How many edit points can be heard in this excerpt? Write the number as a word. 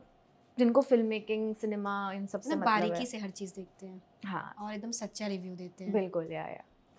zero